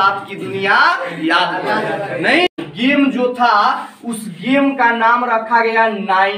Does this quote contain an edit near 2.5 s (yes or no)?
yes